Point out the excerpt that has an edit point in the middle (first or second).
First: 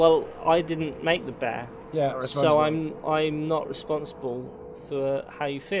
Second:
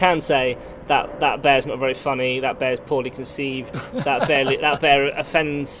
first